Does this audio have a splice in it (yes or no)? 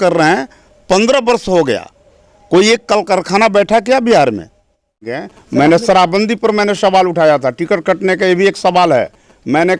yes